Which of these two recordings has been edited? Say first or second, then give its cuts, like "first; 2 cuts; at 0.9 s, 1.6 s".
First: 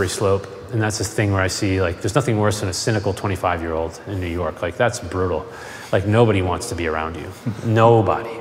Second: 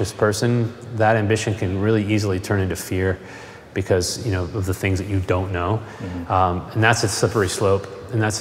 first; 1 cut; at 2.7 s